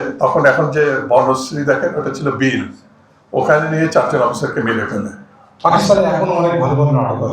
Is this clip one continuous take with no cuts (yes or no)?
no